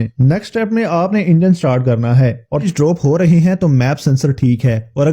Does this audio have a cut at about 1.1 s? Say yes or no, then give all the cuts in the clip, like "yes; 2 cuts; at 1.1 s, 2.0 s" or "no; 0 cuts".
no; 1 cut; at 2.7 s